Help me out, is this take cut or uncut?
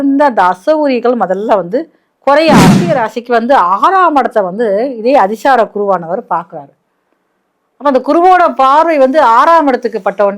cut